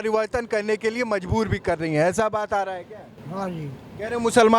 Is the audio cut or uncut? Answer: uncut